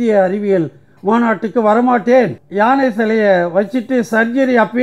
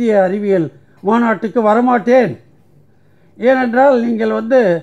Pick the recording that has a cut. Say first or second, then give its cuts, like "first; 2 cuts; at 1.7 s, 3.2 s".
first; 1 cut; at 2.4 s